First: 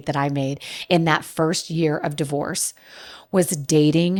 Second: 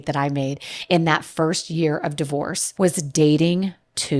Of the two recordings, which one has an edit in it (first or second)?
second